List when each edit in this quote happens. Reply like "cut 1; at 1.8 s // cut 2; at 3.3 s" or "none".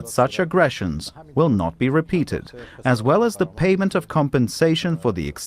cut 1; at 2.7 s